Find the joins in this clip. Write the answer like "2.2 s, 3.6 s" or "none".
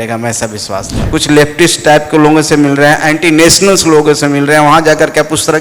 1.0 s